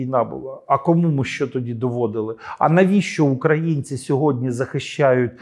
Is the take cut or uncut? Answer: uncut